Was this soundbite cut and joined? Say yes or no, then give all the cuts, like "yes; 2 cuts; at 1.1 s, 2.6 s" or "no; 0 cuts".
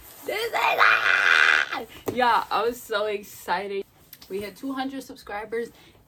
no; 0 cuts